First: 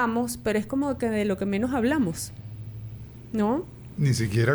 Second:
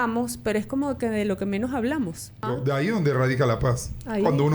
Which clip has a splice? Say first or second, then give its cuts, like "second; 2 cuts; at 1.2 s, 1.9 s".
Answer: second; 1 cut; at 2.5 s